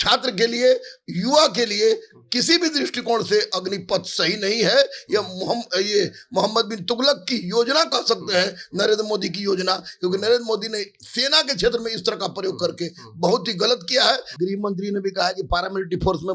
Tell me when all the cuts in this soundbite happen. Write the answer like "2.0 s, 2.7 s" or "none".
14.3 s